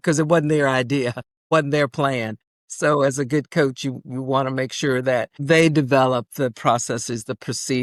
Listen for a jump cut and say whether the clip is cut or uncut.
uncut